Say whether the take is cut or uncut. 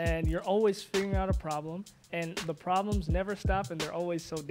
uncut